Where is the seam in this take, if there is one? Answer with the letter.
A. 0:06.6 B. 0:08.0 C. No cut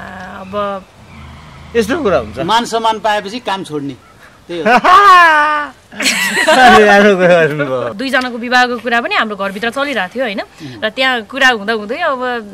B